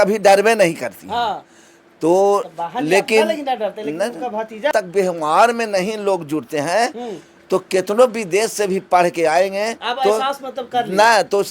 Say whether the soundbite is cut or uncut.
cut